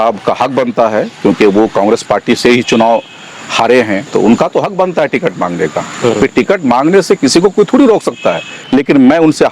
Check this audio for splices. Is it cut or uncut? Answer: cut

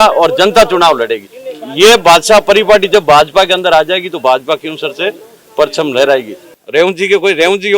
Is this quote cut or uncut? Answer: cut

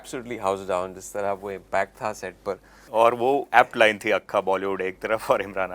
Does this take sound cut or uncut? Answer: cut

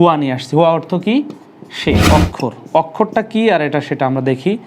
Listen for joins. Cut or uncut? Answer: cut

